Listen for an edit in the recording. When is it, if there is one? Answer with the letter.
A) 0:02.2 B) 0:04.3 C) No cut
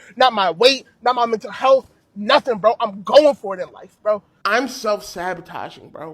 B